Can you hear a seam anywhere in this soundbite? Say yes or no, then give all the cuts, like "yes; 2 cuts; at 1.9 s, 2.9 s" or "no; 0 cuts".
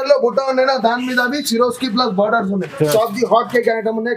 yes; 1 cut; at 2.9 s